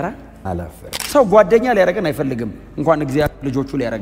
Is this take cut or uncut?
cut